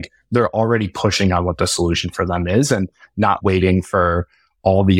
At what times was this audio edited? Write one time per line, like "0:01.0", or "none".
0:03.4